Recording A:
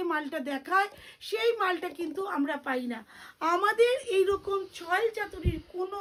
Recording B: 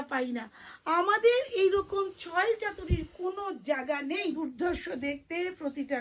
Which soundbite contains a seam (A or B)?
B